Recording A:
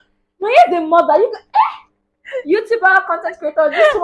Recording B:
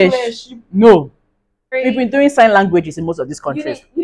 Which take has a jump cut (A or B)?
B